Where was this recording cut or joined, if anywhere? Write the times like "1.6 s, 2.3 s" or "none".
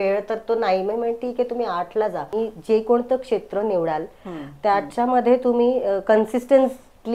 2.3 s